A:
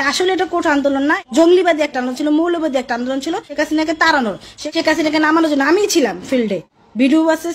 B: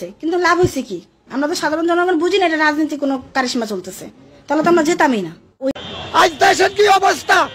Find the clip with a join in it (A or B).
B